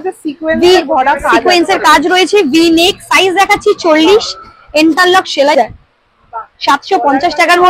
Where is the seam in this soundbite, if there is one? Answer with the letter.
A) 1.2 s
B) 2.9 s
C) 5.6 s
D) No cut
C